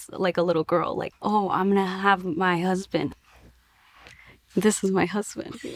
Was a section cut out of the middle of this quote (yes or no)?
no